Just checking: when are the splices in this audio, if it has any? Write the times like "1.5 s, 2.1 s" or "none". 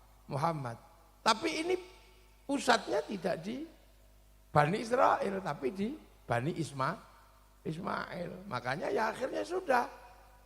6.7 s